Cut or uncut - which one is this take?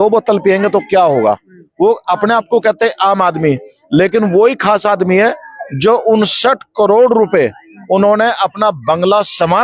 uncut